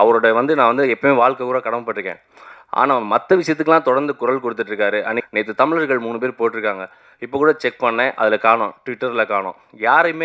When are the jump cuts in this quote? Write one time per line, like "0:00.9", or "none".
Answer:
0:05.2